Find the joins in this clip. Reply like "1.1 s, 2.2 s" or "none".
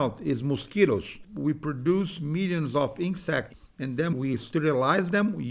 1.3 s, 3.6 s

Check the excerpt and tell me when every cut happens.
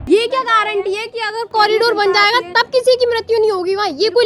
1.5 s

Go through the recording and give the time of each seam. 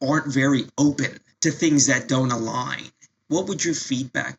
1.2 s

